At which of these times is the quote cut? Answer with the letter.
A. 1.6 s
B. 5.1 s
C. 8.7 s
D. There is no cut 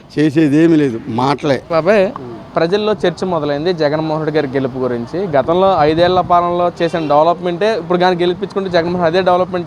A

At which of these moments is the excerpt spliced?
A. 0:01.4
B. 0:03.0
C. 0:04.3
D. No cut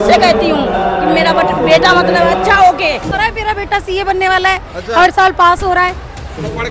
B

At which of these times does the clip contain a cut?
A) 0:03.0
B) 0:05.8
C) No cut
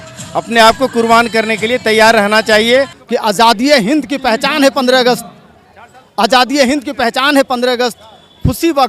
A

